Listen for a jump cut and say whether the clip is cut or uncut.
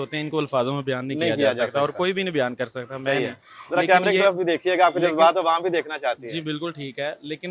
uncut